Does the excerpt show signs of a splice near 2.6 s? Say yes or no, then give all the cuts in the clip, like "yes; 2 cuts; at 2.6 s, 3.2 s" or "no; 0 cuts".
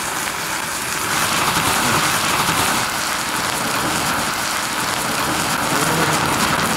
no; 1 cut; at 1.1 s